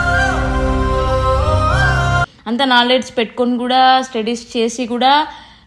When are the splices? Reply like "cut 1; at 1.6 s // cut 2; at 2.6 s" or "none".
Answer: cut 1; at 2.3 s